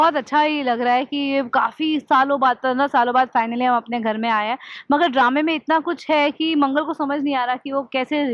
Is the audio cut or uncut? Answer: uncut